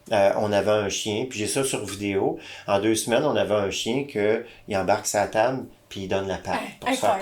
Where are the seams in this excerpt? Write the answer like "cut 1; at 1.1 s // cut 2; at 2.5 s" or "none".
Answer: none